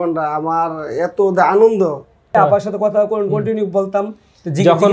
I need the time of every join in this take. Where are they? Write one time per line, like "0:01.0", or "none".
0:02.3